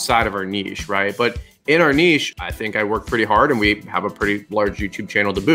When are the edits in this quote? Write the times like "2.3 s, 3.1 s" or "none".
2.5 s